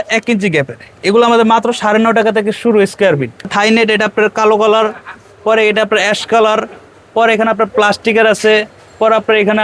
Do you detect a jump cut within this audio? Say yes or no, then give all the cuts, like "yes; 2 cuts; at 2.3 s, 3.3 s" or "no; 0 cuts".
yes; 1 cut; at 3.5 s